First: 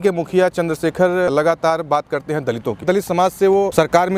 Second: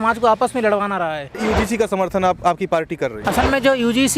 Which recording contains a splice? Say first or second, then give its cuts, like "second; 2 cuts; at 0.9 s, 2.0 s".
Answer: second; 2 cuts; at 1.4 s, 3.2 s